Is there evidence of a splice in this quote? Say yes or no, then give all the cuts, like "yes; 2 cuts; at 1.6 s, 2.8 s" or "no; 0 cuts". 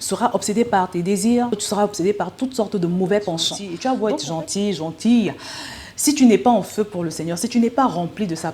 yes; 2 cuts; at 1.6 s, 3.6 s